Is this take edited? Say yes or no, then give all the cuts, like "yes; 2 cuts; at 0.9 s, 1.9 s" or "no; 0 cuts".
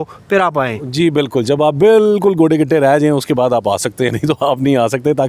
no; 0 cuts